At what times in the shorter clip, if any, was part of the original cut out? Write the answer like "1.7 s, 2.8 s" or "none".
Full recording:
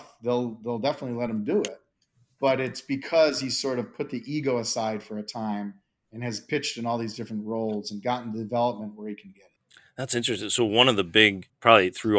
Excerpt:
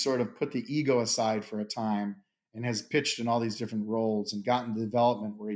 none